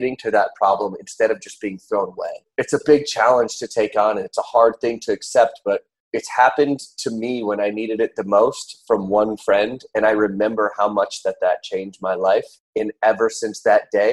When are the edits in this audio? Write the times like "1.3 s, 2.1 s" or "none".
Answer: 2.4 s, 6.0 s, 12.6 s